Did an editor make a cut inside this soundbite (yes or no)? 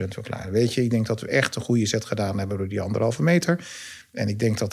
no